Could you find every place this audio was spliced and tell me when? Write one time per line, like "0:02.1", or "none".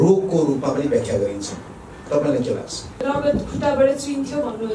0:03.0